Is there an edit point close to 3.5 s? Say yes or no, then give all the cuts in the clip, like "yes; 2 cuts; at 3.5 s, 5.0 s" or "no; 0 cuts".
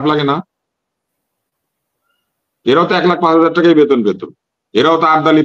no; 0 cuts